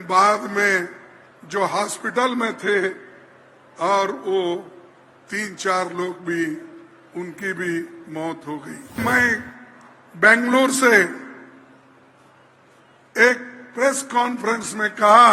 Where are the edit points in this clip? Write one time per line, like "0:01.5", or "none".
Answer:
0:09.0